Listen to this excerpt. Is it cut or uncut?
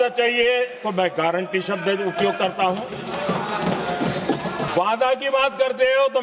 cut